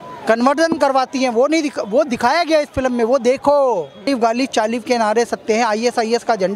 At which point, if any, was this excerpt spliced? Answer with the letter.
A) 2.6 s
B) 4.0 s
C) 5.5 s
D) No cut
B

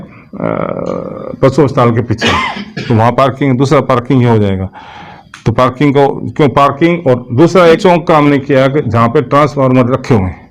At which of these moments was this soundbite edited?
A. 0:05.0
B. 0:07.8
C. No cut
B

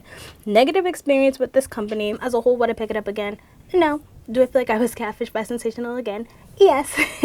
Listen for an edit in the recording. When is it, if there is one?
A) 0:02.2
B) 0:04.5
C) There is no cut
A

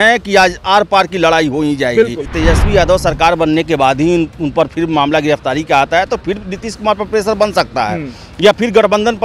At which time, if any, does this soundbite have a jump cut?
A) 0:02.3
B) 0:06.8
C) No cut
A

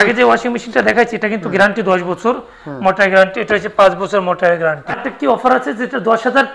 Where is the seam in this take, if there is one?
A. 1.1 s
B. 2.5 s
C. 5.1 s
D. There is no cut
C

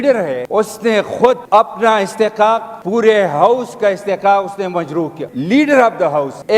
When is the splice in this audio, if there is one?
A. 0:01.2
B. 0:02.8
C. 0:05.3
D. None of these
C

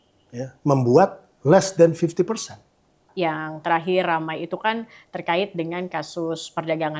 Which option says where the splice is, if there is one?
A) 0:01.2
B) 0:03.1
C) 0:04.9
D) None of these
B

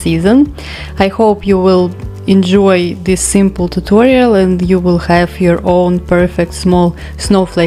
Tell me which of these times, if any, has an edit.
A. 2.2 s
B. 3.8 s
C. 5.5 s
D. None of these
D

